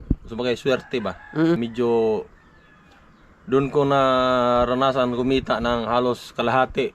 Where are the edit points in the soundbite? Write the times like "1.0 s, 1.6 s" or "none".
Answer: 1.6 s

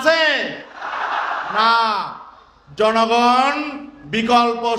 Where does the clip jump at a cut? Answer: none

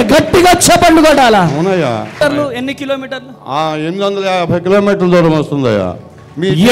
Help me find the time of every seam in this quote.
2.2 s

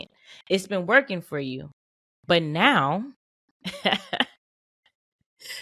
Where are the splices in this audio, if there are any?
none

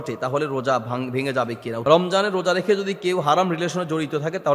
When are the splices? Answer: 1.8 s

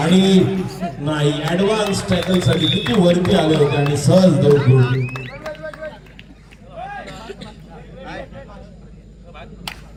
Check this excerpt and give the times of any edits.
none

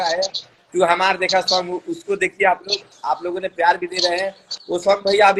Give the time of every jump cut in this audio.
none

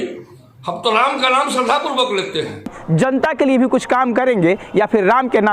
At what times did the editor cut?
2.8 s

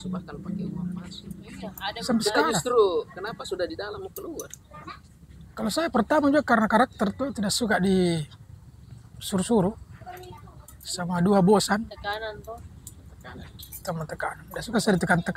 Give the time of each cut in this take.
none

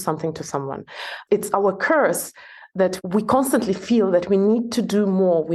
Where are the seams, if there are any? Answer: 1.1 s, 3.0 s

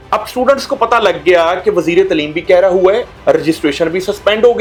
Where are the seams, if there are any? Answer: none

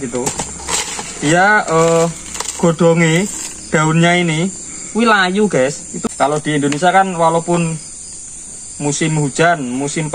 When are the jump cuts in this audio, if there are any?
5.9 s

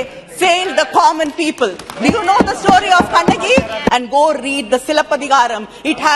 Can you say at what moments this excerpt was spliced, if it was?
3.9 s

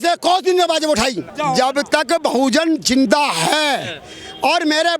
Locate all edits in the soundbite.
1.3 s

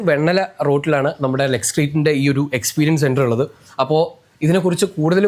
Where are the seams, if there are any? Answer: none

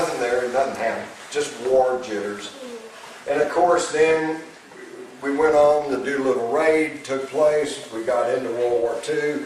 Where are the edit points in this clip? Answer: 8.3 s

